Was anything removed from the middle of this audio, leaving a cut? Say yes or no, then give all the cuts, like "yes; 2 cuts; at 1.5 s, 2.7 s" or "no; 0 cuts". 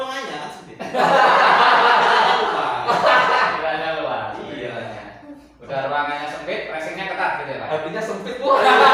no; 0 cuts